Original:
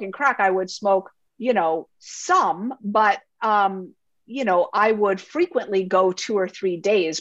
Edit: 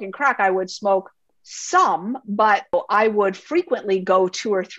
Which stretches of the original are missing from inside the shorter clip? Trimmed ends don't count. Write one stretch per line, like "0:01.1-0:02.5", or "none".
0:01.3-0:01.9
0:03.3-0:04.6